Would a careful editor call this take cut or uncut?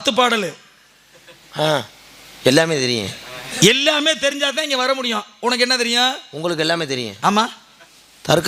uncut